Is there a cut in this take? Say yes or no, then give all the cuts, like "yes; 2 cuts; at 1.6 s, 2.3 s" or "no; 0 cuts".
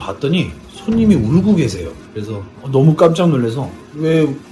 no; 0 cuts